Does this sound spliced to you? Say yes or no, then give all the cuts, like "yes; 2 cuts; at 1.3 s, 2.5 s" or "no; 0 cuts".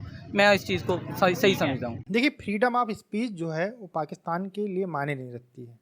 no; 0 cuts